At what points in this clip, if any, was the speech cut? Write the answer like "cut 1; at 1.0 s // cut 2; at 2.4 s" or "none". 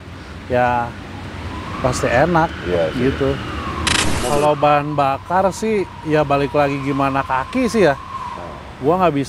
cut 1; at 4.1 s